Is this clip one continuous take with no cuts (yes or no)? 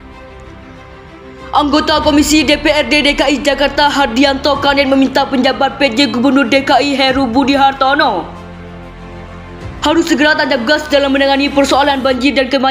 no